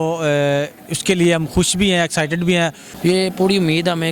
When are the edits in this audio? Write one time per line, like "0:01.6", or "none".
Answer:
0:02.6